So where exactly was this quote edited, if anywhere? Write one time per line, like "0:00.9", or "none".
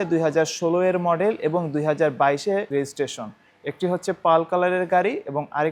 none